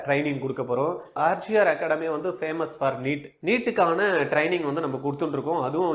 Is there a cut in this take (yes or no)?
yes